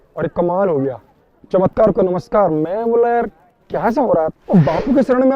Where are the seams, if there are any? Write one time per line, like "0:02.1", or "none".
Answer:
0:04.3